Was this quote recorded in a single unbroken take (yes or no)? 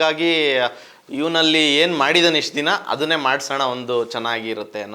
yes